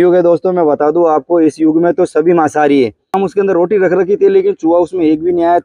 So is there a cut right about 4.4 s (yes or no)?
no